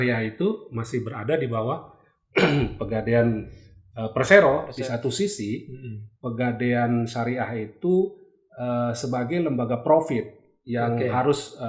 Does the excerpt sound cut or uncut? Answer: cut